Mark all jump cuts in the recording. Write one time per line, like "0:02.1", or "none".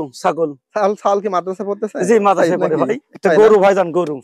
0:03.2

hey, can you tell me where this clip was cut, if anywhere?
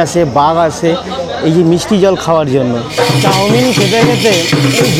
0:02.9

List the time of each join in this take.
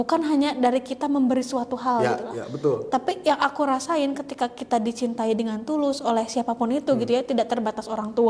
none

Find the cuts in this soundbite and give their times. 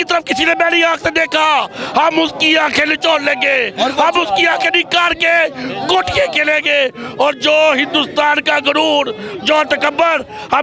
none

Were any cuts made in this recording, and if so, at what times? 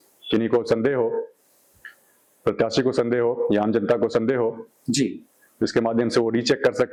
none

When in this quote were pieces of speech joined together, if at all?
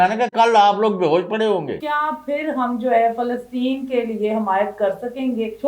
0:01.8

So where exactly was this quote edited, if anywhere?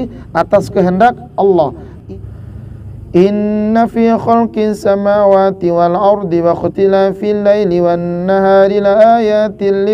0:01.9

